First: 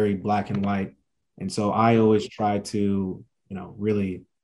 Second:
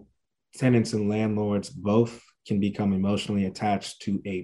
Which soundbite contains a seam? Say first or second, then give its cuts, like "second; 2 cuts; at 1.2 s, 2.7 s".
first; 1 cut; at 1.0 s